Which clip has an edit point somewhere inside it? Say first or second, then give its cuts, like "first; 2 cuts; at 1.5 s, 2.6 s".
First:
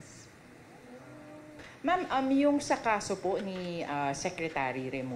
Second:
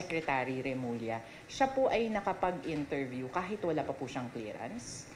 first; 1 cut; at 1.7 s